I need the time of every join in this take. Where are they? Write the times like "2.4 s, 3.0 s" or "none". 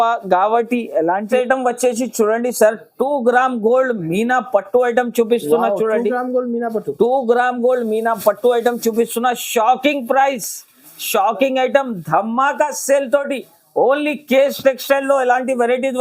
1.2 s